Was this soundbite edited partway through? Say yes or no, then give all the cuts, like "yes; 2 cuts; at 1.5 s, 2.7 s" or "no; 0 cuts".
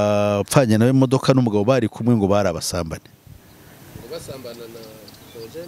no; 0 cuts